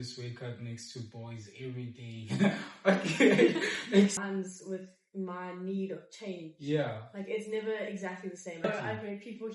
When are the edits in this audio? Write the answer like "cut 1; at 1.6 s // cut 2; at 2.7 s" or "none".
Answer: cut 1; at 4.2 s // cut 2; at 8.6 s